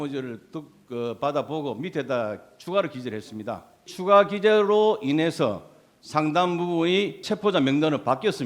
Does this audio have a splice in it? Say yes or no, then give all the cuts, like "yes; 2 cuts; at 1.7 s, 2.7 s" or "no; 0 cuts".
yes; 2 cuts; at 3.9 s, 7.2 s